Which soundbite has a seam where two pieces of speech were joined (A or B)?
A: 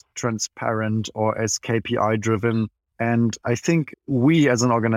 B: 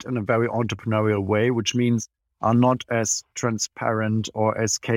A